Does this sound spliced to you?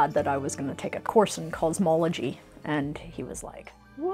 yes; 1 cut; at 1.0 s

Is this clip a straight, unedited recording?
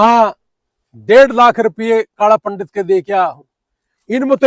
yes; 0 cuts

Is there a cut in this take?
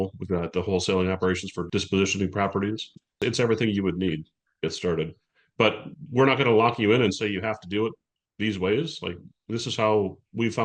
yes; 1 cut; at 1.6 s

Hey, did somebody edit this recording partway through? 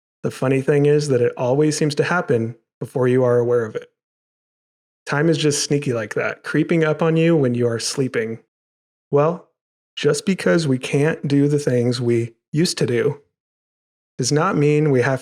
yes; 1 cut; at 8.5 s

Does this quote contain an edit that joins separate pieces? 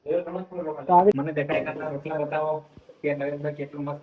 yes; 1 cut; at 1.1 s

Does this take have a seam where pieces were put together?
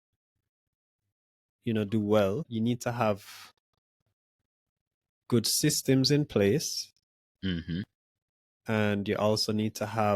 yes; 1 cut; at 2.5 s

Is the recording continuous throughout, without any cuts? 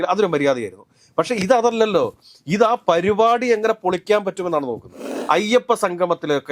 no; 1 cut; at 5.1 s

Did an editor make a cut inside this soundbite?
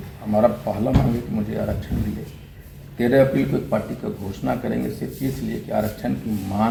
no; 0 cuts

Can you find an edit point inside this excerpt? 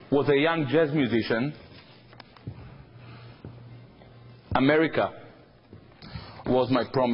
no; 0 cuts

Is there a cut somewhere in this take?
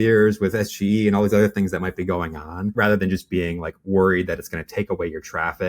no; 0 cuts

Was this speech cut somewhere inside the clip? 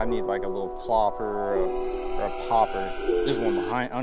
no; 0 cuts

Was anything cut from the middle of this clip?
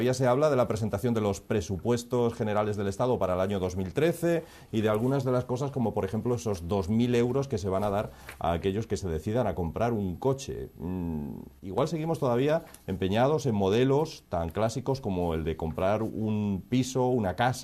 no; 0 cuts

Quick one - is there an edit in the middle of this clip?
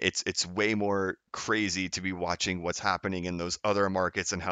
no; 0 cuts

